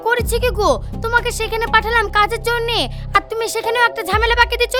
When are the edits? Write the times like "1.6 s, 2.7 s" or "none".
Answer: none